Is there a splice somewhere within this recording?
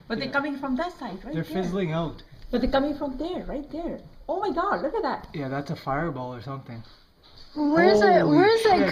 yes; 1 cut; at 3.7 s

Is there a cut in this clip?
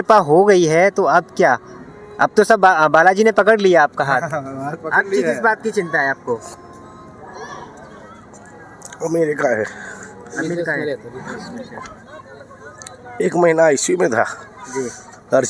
no; 0 cuts

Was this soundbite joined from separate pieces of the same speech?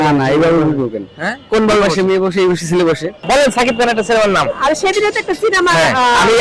yes; 1 cut; at 3.2 s

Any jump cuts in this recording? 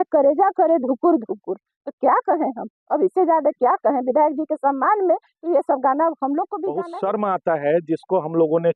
yes; 1 cut; at 6.6 s

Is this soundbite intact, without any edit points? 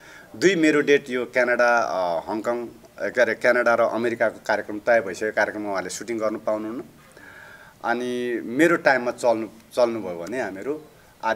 yes; 0 cuts

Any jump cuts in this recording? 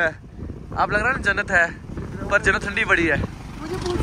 no; 0 cuts

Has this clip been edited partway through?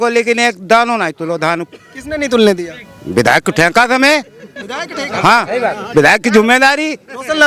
no; 0 cuts

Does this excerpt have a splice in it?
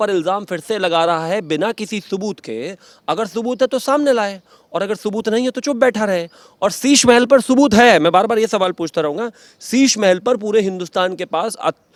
no; 0 cuts

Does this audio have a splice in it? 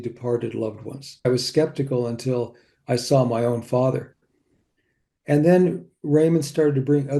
yes; 2 cuts; at 1.3 s, 4.8 s

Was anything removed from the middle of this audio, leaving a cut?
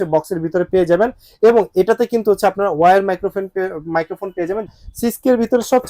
yes; 1 cut; at 4.7 s

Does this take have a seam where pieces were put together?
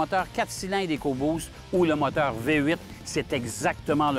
no; 0 cuts

